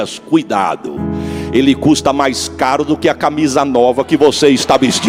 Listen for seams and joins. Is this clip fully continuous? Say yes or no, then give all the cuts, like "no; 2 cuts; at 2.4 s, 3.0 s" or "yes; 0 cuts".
yes; 0 cuts